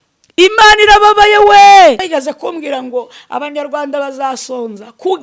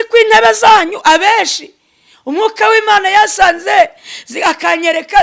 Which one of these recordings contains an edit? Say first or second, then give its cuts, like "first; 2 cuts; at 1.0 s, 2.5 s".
first; 1 cut; at 2.1 s